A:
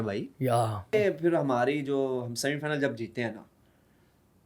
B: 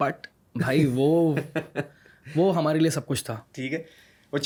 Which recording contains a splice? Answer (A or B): A